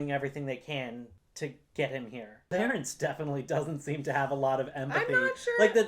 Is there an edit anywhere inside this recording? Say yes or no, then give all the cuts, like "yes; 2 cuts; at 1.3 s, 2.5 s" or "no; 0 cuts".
yes; 1 cut; at 2.5 s